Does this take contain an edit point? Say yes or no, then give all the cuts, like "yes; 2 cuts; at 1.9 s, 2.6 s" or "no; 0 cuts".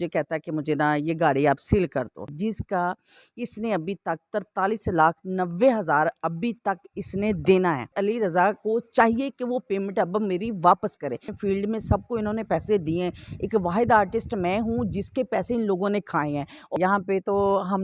yes; 4 cuts; at 2.3 s, 8.0 s, 11.3 s, 16.8 s